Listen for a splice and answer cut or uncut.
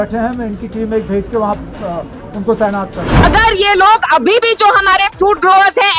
cut